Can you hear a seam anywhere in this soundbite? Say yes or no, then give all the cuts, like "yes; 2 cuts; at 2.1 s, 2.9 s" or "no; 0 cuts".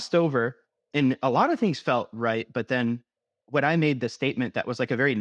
no; 0 cuts